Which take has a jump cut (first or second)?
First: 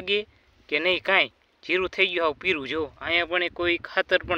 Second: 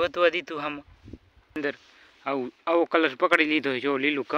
second